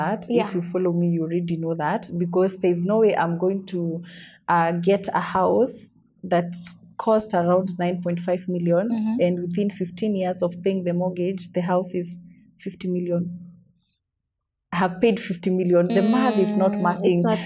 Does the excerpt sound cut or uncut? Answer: uncut